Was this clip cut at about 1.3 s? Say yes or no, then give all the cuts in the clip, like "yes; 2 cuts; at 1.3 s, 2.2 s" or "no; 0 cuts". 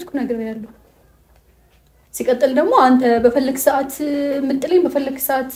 no; 0 cuts